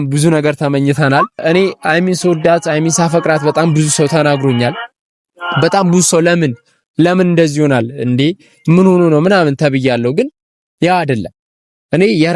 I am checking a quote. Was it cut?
yes; 1 cut; at 1.4 s

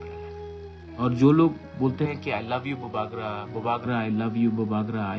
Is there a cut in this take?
yes; 1 cut; at 0.9 s

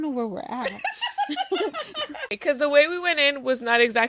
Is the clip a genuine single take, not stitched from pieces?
no; 1 cut; at 2.4 s

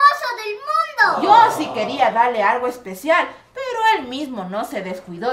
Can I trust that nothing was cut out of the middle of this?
yes; 0 cuts

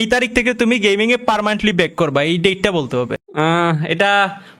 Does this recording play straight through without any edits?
no; 1 cut; at 3.2 s

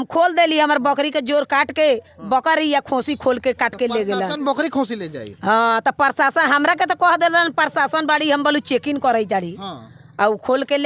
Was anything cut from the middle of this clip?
no; 0 cuts

